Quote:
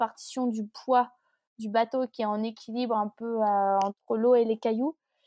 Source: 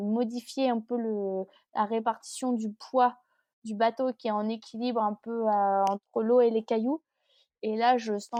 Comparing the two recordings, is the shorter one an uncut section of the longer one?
yes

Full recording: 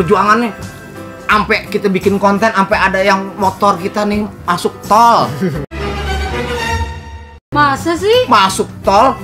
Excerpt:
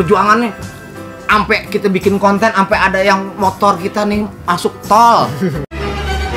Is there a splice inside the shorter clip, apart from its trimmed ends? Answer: no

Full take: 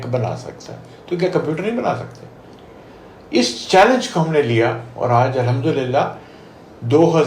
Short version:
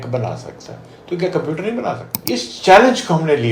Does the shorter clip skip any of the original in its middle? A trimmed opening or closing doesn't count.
yes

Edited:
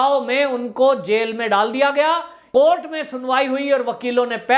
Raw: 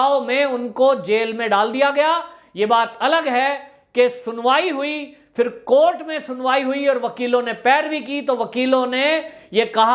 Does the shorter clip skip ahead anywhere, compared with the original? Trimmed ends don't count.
yes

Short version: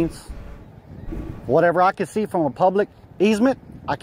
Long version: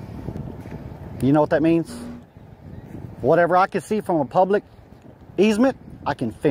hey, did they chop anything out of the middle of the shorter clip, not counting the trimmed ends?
yes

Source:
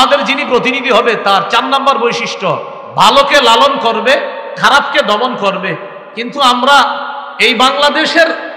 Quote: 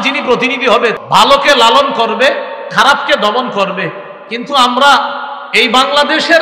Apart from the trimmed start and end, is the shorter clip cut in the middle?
yes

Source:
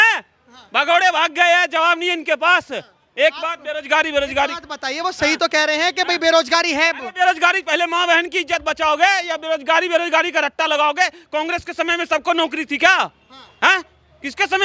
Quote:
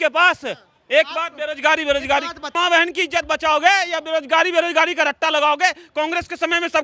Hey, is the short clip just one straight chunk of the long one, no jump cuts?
no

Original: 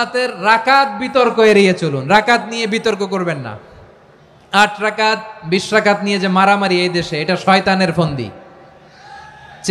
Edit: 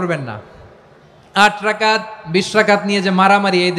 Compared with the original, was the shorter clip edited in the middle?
no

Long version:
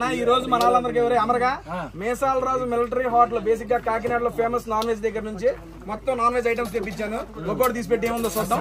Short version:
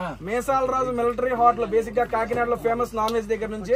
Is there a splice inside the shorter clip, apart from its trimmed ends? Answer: no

